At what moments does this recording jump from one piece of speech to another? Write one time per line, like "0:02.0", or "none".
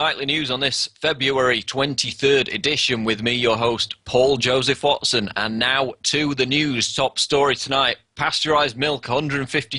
0:01.2